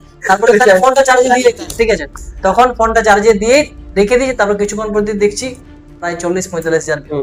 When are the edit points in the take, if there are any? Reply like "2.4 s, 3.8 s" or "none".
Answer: none